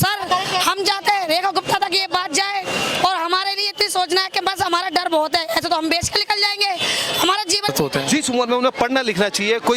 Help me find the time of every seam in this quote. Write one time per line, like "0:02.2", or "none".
0:07.7